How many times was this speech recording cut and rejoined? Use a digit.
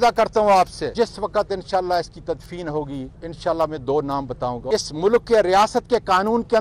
3